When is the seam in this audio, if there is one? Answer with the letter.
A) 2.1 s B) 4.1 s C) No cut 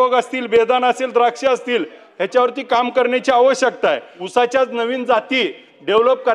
B